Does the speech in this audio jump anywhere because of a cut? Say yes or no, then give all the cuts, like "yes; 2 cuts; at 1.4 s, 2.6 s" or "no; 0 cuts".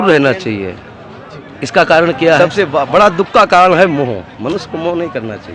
yes; 1 cut; at 2.4 s